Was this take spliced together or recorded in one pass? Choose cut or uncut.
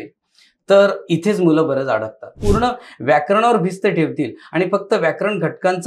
cut